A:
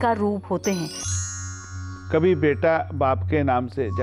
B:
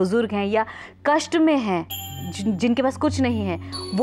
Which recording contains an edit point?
A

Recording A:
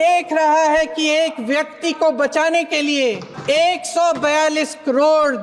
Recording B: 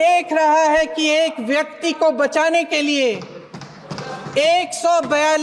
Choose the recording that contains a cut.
A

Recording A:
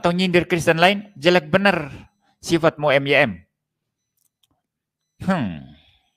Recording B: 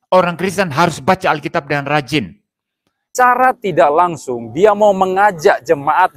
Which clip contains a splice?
B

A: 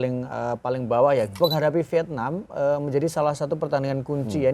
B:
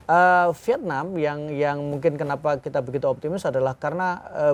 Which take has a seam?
A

